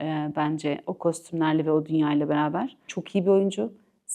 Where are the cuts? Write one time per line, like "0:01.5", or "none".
0:02.9